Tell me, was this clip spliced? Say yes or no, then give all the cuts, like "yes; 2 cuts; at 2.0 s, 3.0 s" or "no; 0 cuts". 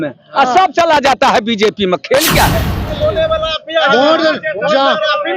yes; 1 cut; at 3.0 s